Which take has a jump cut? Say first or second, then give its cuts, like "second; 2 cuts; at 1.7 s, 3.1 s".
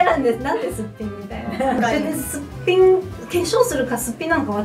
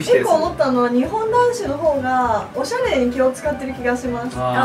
first; 1 cut; at 1.8 s